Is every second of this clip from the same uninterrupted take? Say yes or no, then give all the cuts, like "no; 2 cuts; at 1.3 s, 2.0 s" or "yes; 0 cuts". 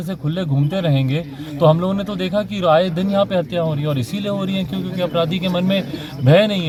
yes; 0 cuts